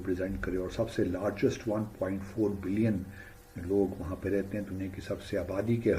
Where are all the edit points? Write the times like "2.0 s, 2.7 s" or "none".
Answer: none